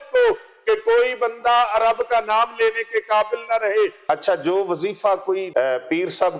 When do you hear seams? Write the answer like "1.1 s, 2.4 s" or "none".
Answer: 4.0 s, 5.5 s